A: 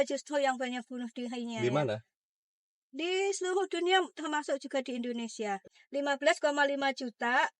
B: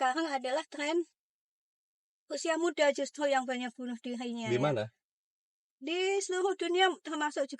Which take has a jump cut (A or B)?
A